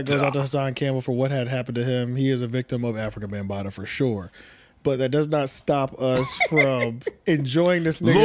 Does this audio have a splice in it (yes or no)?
no